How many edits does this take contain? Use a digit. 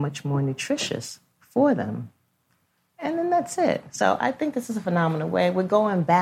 0